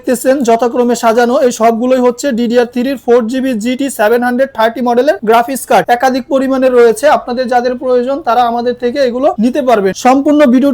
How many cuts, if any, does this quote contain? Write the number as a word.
two